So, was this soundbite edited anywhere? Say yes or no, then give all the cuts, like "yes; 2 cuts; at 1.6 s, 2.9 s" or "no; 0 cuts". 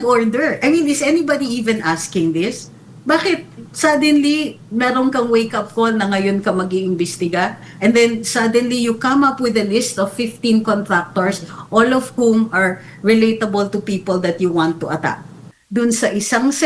yes; 1 cut; at 15.6 s